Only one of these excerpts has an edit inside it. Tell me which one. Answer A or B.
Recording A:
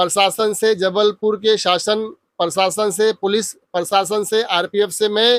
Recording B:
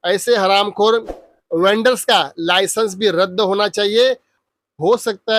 B